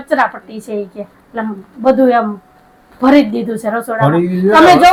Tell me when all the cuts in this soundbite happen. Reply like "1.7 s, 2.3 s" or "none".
none